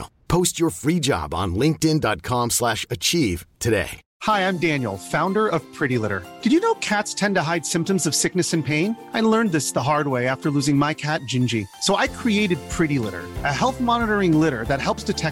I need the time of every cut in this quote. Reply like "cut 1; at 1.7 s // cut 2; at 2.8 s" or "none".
cut 1; at 4.0 s